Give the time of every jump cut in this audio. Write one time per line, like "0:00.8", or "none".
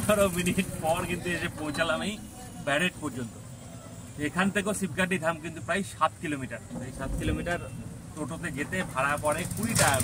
none